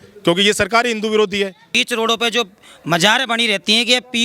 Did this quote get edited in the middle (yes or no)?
yes